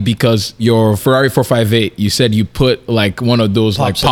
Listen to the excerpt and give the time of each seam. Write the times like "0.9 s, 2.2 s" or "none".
0.9 s